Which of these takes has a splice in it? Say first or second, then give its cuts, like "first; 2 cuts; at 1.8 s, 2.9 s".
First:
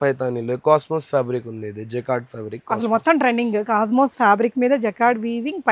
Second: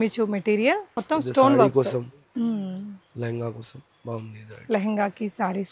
second; 1 cut; at 0.9 s